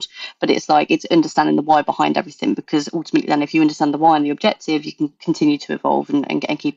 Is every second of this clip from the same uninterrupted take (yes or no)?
yes